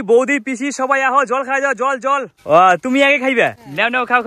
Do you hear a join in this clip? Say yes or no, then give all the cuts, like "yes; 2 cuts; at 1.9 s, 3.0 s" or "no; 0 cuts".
no; 0 cuts